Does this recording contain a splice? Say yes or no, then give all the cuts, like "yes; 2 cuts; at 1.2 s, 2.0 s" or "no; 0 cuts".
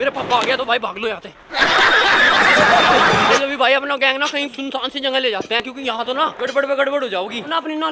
no; 0 cuts